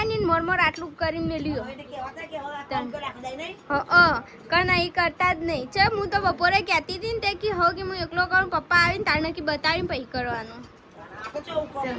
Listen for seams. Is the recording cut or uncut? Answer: uncut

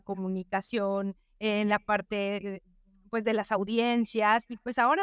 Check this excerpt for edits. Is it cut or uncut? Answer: uncut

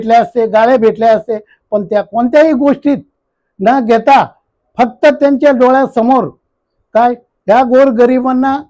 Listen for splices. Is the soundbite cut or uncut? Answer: uncut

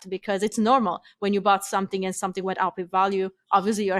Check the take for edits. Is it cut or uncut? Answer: uncut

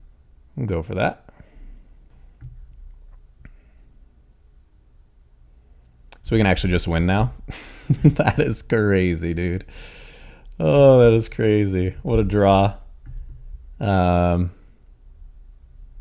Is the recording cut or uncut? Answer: cut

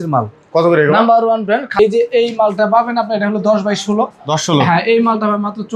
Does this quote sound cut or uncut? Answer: cut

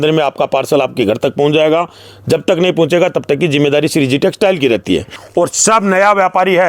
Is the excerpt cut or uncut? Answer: cut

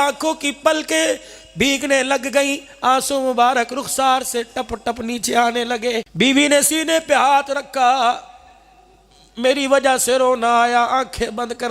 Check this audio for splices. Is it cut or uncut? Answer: cut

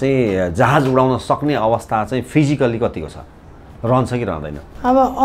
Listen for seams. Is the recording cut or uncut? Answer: uncut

